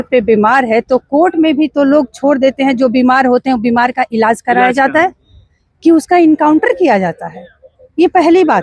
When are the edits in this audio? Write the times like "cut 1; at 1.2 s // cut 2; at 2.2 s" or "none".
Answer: none